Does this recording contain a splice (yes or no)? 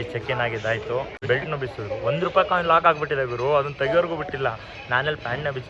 yes